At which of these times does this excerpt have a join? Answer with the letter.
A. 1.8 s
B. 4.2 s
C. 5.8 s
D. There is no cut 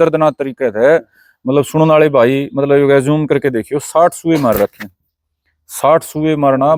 D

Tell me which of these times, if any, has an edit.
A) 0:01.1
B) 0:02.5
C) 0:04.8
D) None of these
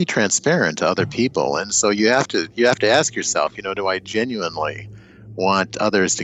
D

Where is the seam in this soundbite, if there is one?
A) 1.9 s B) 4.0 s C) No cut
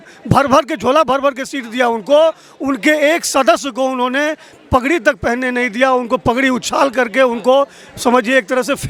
C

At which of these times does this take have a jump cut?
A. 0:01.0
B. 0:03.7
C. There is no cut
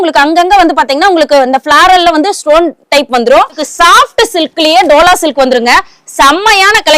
B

